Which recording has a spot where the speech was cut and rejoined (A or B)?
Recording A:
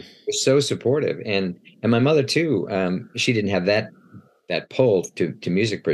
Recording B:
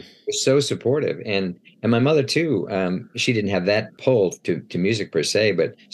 B